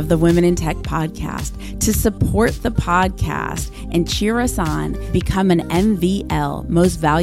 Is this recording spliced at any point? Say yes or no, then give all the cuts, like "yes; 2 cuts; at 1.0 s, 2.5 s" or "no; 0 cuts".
no; 0 cuts